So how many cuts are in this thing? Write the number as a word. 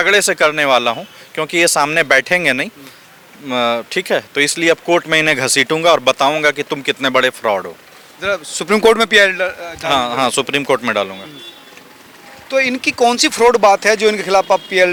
zero